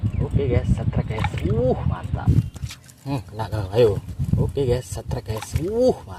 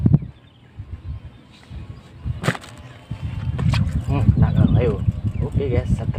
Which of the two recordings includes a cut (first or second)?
first